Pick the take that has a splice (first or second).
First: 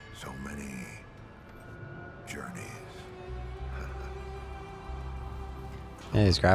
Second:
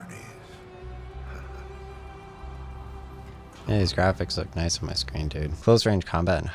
second